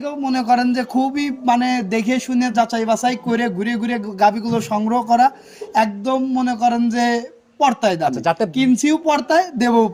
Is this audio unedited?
yes; 0 cuts

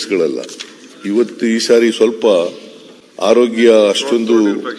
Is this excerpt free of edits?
yes; 0 cuts

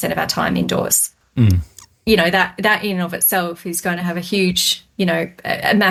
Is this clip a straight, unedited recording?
yes; 0 cuts

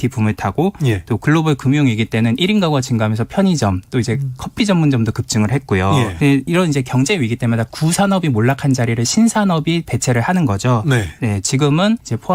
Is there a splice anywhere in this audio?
no; 0 cuts

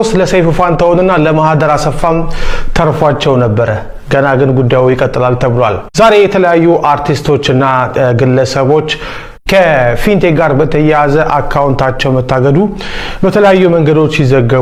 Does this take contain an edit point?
no; 0 cuts

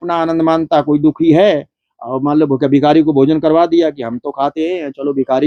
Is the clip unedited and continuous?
yes; 0 cuts

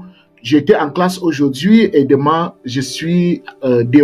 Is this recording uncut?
yes; 0 cuts

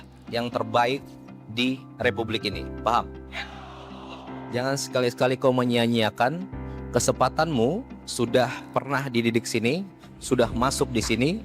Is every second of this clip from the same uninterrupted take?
yes; 0 cuts

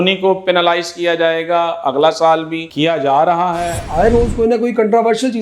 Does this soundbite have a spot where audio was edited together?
yes; 1 cut; at 3.8 s

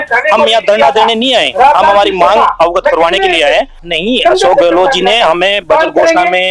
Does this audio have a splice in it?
yes; 1 cut; at 3.8 s

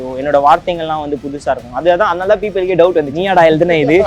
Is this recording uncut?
no; 1 cut; at 3.1 s

